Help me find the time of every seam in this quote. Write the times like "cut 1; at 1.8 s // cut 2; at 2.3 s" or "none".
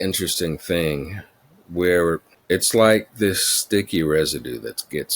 cut 1; at 2.3 s